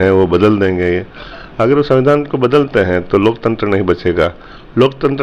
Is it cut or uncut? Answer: uncut